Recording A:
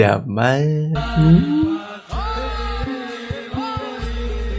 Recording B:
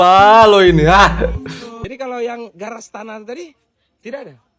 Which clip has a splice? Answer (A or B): B